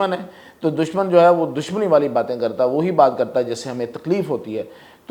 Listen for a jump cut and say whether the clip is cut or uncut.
uncut